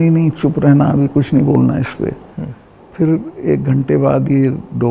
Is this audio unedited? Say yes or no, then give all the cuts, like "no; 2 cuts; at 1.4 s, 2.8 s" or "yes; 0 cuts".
yes; 0 cuts